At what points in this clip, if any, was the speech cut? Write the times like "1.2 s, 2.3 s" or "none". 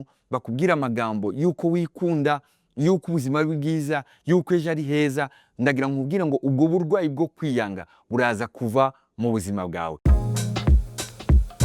10.1 s